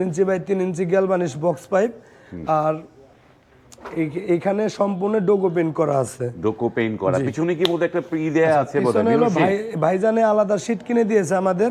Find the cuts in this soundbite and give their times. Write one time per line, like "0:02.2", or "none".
none